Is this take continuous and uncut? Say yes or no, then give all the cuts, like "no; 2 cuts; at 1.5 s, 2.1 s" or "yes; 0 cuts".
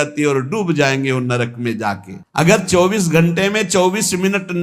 no; 1 cut; at 2.1 s